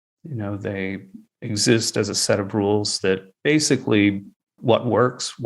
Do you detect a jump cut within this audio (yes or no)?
yes